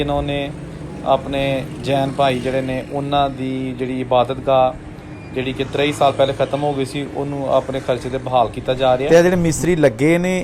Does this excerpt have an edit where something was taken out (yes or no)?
yes